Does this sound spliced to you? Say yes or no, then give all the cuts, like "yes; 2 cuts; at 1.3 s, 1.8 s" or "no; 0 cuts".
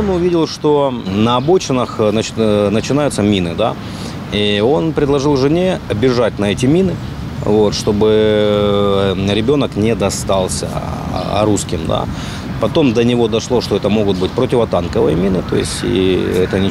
yes; 1 cut; at 1.1 s